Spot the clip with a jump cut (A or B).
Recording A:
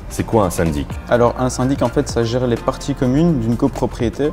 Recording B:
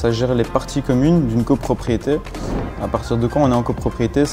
A